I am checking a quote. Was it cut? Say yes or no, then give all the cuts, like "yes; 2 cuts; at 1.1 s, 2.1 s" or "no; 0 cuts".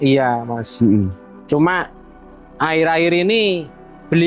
no; 0 cuts